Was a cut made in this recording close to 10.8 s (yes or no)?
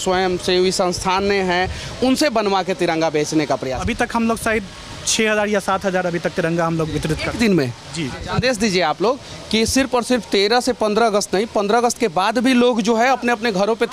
no